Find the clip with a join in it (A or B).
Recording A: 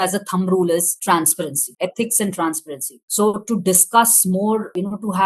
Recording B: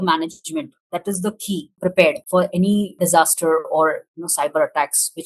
B